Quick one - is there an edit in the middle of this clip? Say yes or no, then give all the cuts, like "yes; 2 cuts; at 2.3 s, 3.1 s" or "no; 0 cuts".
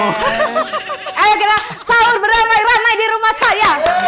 yes; 1 cut; at 1.1 s